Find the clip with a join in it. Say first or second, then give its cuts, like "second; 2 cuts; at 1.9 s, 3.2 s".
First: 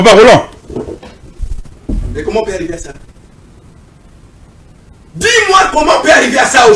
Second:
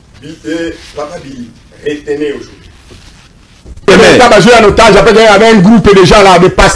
second; 1 cut; at 3.9 s